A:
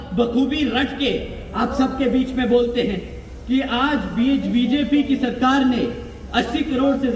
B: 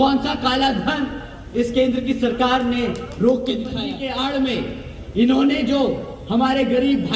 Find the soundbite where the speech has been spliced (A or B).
B